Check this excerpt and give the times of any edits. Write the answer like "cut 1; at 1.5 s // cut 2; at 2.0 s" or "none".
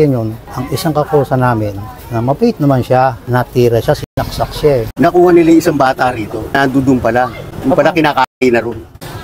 cut 1; at 4.9 s